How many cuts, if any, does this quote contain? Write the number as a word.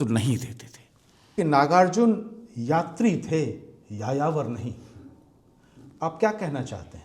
one